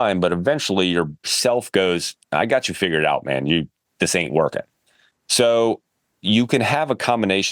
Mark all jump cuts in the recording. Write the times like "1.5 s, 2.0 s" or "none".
none